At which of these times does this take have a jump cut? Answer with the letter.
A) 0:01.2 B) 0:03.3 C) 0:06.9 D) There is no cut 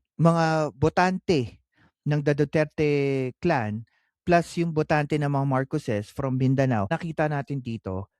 C